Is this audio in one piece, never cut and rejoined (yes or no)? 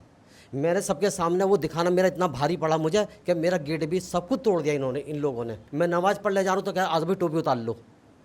no